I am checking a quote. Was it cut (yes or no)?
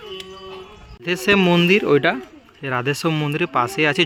no